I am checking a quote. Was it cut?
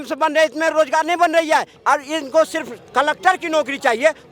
yes; 1 cut; at 1.7 s

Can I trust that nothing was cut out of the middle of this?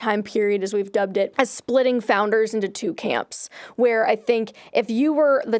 no; 1 cut; at 1.3 s

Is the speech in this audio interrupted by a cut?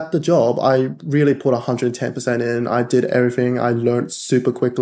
no; 0 cuts

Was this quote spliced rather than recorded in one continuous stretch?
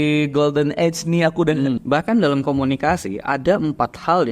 yes; 1 cut; at 1.8 s

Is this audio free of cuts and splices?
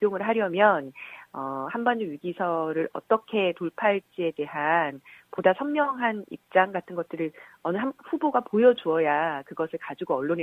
no; 1 cut; at 6.0 s

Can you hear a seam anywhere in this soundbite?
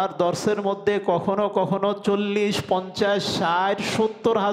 no; 0 cuts

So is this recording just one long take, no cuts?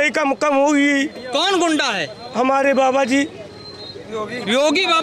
yes; 0 cuts

